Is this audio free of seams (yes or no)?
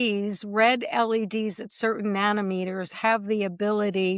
yes